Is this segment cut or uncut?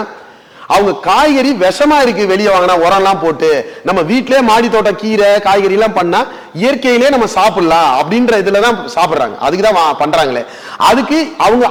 uncut